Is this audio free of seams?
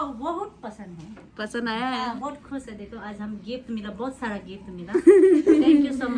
yes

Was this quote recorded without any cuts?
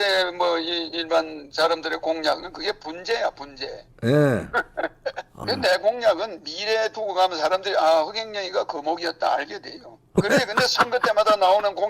no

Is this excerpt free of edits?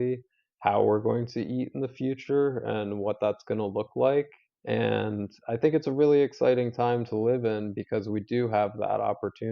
yes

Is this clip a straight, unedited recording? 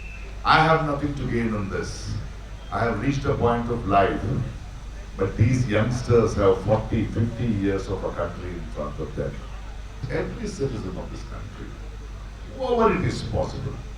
no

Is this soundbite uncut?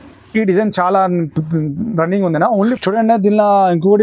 no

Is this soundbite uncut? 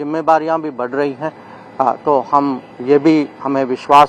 yes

